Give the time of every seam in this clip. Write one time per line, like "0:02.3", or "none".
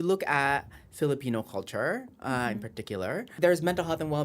0:03.3